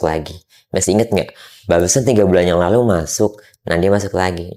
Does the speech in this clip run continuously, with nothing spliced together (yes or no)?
yes